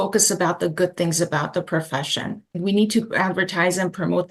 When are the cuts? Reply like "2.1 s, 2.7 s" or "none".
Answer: 2.6 s